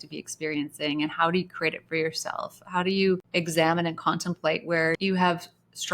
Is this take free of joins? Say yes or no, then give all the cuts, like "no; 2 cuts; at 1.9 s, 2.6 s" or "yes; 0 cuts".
no; 2 cuts; at 3.3 s, 5.0 s